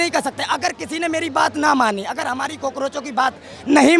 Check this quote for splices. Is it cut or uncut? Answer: uncut